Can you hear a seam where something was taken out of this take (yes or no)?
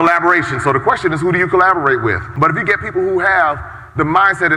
yes